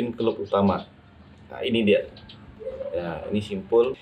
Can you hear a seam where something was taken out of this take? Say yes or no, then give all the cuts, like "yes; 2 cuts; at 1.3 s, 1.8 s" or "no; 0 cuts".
no; 0 cuts